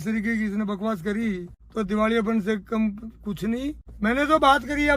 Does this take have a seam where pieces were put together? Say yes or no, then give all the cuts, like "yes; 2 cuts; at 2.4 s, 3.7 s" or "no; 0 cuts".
yes; 2 cuts; at 1.6 s, 3.9 s